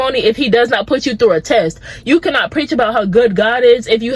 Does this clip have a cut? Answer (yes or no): no